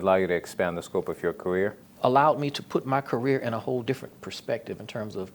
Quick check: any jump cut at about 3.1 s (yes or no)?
no